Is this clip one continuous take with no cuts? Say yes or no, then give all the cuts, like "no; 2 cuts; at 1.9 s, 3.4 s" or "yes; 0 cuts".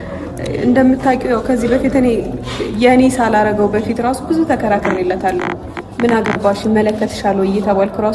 yes; 0 cuts